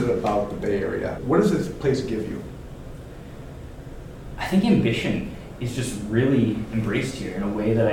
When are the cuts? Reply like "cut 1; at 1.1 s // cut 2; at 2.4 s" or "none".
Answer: cut 1; at 1.2 s